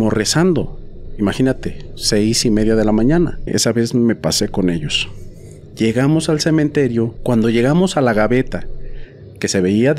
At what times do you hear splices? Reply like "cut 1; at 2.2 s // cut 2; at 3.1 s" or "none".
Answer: cut 1; at 3.5 s // cut 2; at 7.2 s